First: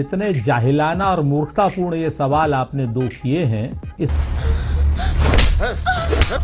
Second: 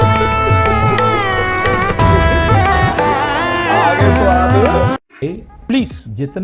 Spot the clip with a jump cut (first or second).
second